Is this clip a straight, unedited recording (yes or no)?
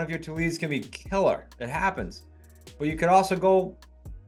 yes